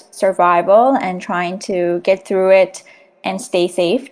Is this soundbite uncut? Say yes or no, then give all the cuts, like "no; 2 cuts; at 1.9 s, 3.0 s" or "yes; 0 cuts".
no; 1 cut; at 3.2 s